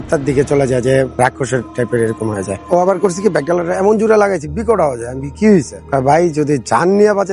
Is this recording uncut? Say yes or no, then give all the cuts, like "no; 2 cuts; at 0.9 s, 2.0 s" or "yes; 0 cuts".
no; 1 cut; at 5.8 s